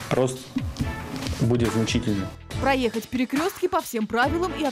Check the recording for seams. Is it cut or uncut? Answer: cut